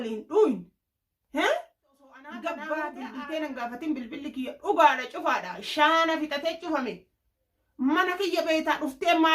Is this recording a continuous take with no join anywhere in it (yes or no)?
no